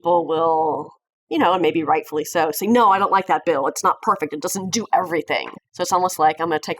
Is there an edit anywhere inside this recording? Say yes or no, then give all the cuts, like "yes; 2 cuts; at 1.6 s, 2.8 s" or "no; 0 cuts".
yes; 1 cut; at 5.5 s